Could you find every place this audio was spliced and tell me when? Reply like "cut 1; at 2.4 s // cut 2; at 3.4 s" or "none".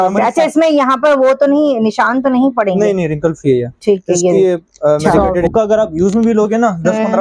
cut 1; at 5.4 s